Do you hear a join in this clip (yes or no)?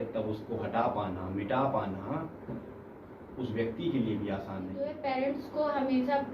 yes